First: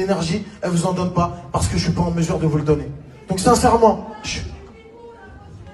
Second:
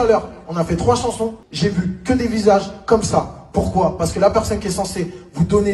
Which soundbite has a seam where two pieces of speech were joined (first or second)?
second